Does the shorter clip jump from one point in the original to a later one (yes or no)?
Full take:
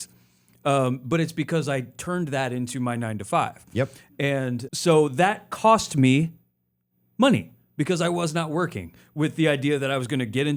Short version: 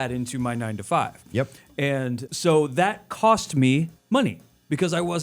yes